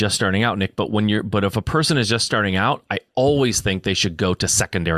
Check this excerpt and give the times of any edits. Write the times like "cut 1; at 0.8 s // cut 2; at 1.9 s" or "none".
none